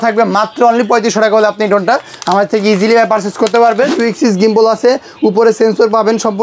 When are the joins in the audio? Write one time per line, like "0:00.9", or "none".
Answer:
0:03.9